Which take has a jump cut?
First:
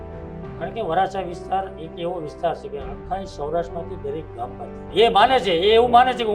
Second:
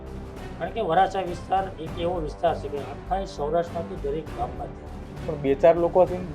first; 1 cut; at 4.9 s

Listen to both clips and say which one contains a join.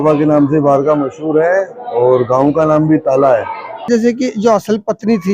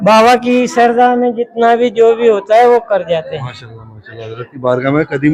first; 1 cut; at 3.9 s

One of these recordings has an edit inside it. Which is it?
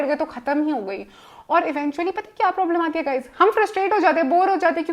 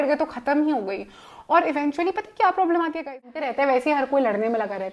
second; 1 cut; at 3.3 s

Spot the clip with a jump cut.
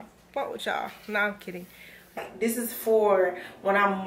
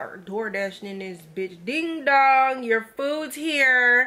first; 1 cut; at 2.2 s

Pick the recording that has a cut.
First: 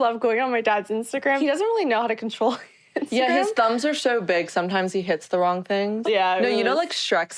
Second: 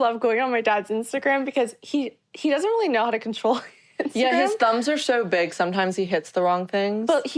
first; 2 cuts; at 1.4 s, 6.0 s

